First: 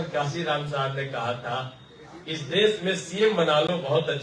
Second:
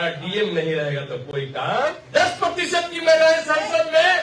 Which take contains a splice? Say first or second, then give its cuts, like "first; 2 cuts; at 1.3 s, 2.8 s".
second; 1 cut; at 2.0 s